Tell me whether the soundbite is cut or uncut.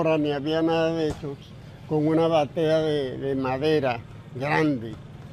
uncut